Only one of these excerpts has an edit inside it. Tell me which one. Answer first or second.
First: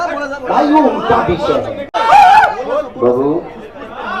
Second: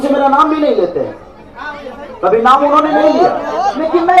first